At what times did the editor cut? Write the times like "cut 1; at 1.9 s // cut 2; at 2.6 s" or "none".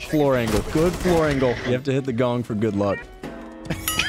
cut 1; at 1.6 s // cut 2; at 3.0 s